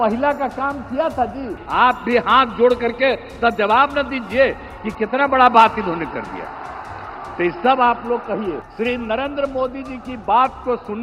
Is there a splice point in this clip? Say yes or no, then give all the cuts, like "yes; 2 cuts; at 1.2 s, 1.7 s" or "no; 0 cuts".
yes; 2 cuts; at 1.6 s, 8.7 s